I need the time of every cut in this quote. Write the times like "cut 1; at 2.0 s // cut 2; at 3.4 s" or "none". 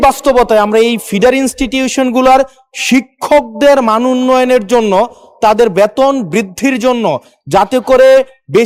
none